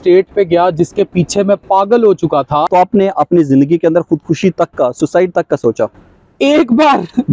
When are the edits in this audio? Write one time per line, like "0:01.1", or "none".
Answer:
0:02.7